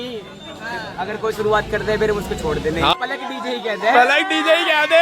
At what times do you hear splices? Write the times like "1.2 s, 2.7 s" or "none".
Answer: 2.9 s